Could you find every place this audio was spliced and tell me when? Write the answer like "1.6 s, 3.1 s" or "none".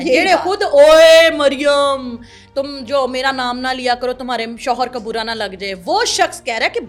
none